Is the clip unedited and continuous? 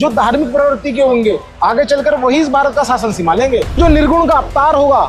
no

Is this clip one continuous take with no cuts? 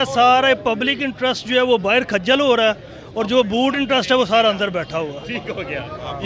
yes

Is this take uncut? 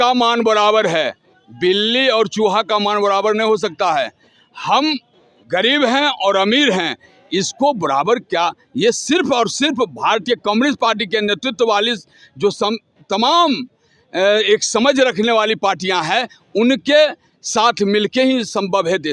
yes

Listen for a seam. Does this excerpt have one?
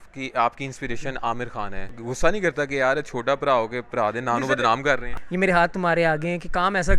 yes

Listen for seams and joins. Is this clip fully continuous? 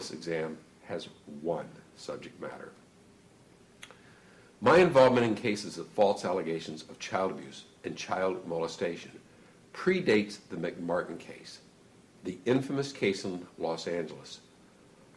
no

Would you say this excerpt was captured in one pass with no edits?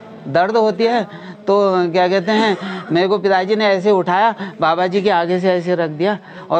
yes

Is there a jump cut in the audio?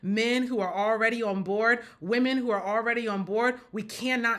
no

